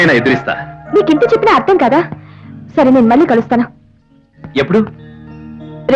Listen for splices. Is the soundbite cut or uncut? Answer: uncut